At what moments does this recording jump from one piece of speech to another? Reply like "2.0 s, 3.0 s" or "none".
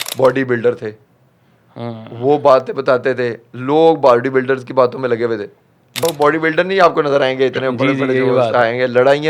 6.0 s